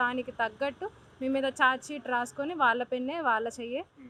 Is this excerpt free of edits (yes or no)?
yes